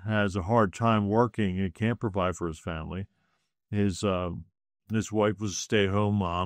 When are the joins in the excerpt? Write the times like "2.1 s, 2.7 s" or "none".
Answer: none